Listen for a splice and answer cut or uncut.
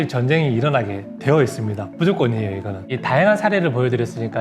cut